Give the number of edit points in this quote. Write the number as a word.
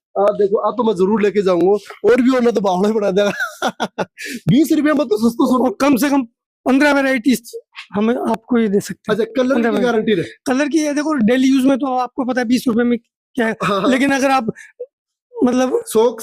zero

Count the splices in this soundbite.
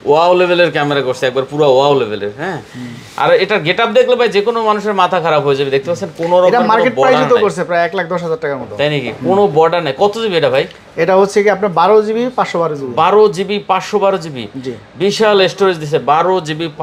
zero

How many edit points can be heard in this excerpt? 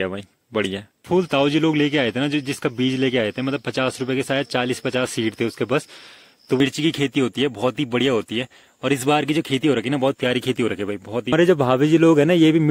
three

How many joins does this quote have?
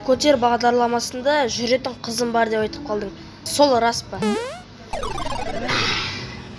one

